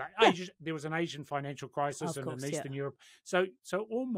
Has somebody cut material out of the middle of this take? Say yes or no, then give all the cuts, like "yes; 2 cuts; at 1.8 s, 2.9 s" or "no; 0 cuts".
no; 0 cuts